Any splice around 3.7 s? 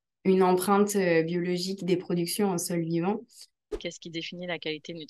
yes; 1 cut; at 3.7 s

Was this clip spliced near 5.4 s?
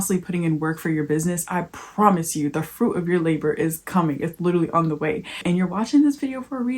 yes; 1 cut; at 5.4 s

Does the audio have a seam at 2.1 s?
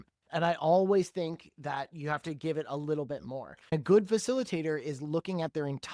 no; 1 cut; at 3.7 s

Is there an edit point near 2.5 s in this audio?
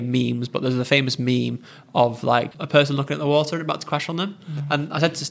yes; 1 cut; at 2.5 s

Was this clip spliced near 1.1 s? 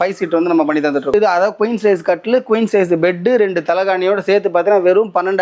yes; 1 cut; at 1.1 s

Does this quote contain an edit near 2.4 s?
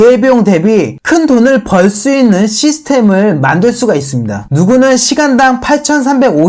no; 2 cuts; at 0.9 s, 4.4 s

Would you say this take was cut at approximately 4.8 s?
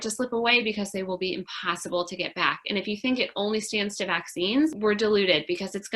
yes; 1 cut; at 4.8 s

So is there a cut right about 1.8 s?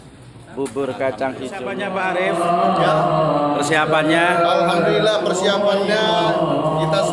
yes; 1 cut; at 1.8 s

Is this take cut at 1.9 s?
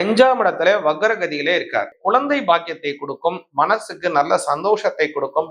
yes; 1 cut; at 1.9 s

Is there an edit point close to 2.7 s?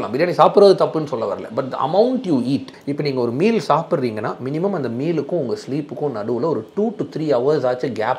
yes; 1 cut; at 2.7 s

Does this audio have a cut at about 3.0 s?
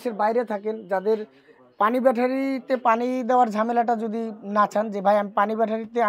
no; 0 cuts

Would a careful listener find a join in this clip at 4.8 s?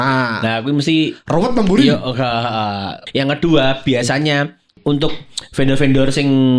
yes; 2 cuts; at 3.0 s, 4.8 s

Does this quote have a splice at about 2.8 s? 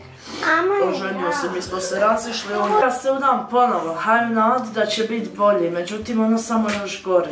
yes; 1 cut; at 2.8 s

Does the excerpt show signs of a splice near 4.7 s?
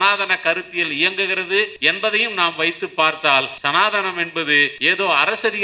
yes; 3 cuts; at 1.8 s, 3.5 s, 4.7 s

